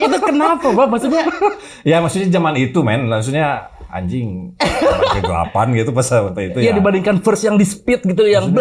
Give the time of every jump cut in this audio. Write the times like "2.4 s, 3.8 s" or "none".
none